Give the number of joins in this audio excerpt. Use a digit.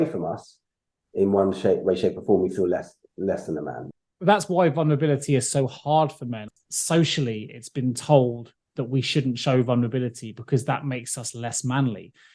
2